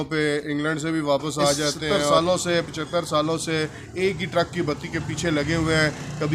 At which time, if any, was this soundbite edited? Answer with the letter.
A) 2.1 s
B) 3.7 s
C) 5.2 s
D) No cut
A